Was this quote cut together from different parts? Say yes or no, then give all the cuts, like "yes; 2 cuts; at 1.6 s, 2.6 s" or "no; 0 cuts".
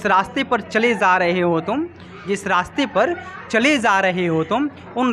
no; 0 cuts